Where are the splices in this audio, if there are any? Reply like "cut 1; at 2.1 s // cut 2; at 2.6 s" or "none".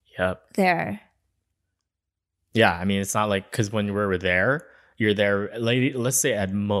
none